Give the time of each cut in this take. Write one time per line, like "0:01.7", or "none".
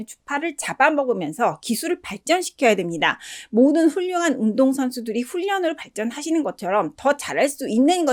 none